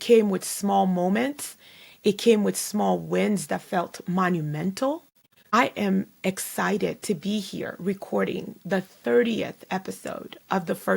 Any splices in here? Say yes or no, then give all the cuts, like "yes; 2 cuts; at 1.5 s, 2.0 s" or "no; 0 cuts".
yes; 1 cut; at 5.1 s